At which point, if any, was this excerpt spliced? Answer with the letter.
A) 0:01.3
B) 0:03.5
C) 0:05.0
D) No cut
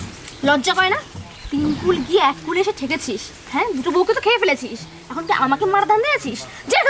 D